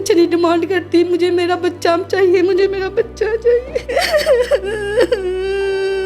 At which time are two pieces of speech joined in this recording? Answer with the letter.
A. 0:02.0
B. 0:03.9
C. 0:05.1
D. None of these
B